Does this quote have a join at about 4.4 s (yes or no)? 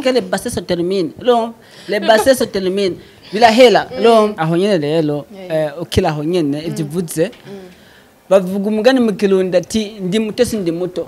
yes